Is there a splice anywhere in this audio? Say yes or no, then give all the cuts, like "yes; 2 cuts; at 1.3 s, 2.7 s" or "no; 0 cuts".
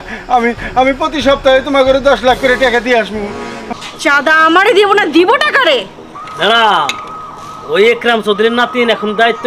yes; 1 cut; at 3.6 s